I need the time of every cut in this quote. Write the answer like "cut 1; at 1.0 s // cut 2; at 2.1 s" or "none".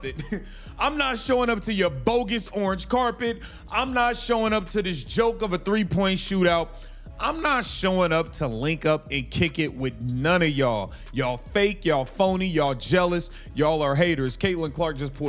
cut 1; at 12.9 s